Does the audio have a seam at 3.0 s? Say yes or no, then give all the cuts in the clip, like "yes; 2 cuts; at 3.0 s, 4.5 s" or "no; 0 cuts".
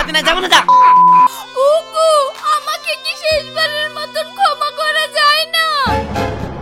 no; 1 cut; at 1.3 s